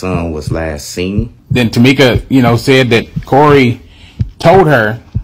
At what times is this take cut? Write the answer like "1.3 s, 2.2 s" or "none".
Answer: 1.4 s